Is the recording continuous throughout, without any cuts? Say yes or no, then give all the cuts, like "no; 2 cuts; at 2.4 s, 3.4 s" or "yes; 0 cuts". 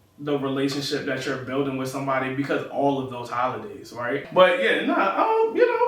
no; 1 cut; at 4.3 s